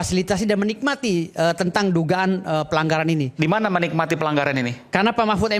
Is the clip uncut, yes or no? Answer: yes